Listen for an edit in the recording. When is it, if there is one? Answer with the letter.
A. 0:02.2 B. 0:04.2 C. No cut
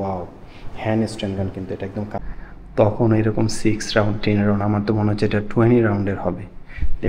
A